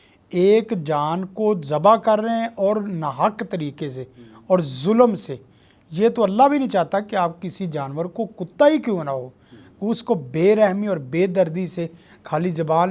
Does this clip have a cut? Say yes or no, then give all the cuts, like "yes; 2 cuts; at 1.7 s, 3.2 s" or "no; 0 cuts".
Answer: no; 0 cuts